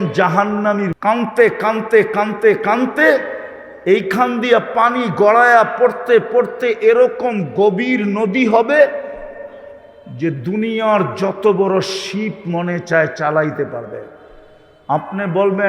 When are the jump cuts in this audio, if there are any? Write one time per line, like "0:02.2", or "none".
0:01.0